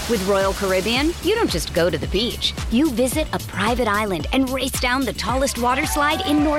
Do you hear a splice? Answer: no; 0 cuts

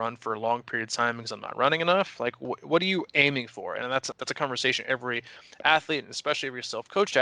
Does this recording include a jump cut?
yes; 1 cut; at 4.1 s

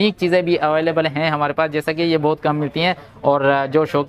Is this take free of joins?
yes; 0 cuts

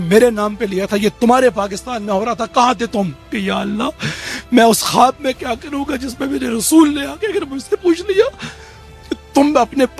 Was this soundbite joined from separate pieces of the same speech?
yes; 1 cut; at 3.3 s

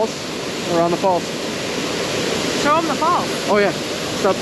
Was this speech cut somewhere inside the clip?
no; 0 cuts

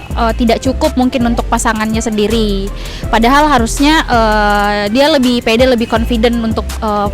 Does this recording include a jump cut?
no; 0 cuts

